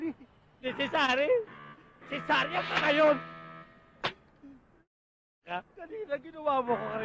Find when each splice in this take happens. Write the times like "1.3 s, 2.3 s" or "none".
none